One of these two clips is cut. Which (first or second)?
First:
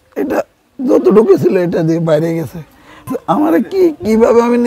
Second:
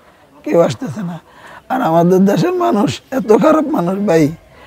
first